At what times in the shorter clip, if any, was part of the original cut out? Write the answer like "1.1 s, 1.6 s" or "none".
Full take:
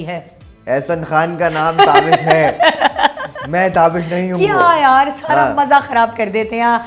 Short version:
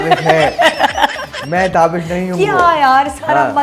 none